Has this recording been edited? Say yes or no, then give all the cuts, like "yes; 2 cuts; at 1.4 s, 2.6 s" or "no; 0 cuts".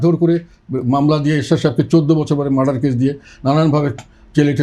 no; 0 cuts